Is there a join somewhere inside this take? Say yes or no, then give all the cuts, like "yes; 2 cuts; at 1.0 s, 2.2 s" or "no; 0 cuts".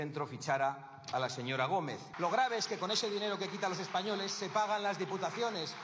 yes; 1 cut; at 2.0 s